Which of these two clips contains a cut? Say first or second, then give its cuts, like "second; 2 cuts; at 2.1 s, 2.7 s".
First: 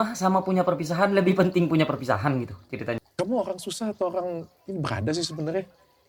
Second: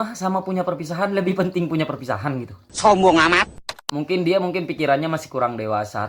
first; 1 cut; at 2.8 s